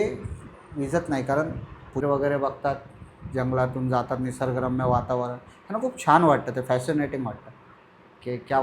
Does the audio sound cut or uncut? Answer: cut